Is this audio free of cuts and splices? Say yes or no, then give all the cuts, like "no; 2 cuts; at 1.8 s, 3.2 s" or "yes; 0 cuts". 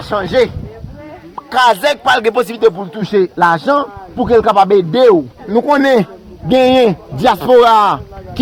no; 1 cut; at 5.5 s